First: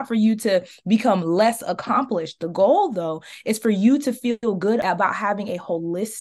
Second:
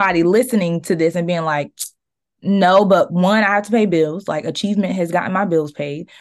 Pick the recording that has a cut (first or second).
first